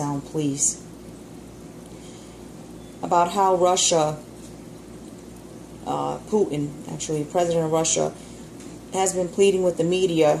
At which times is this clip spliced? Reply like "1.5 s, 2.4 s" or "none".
5.5 s